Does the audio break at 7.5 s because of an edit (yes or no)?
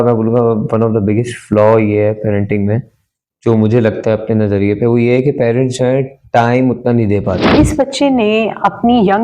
yes